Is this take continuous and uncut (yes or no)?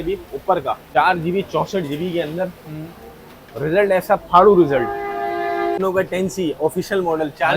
no